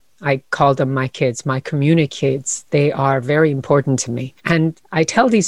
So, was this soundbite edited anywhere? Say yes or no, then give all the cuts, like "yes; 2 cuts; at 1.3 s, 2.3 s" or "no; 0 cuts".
no; 0 cuts